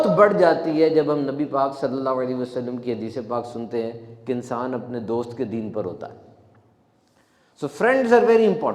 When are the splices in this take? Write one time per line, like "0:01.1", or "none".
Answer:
none